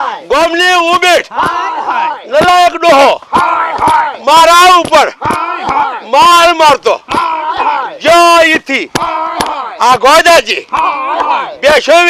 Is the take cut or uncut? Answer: uncut